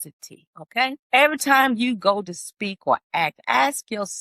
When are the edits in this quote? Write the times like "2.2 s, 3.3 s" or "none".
1.0 s

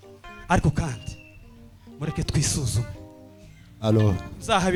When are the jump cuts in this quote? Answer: none

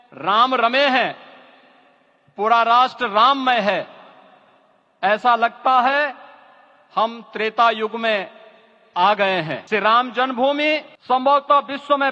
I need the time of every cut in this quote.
9.6 s, 10.9 s

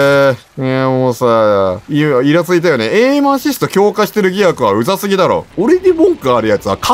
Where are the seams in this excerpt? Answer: 5.5 s

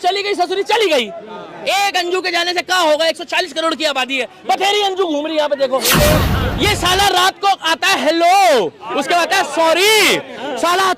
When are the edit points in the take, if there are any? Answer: 6.3 s

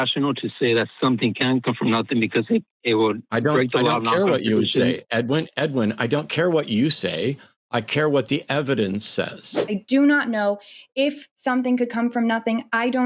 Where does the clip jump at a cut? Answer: 9.6 s

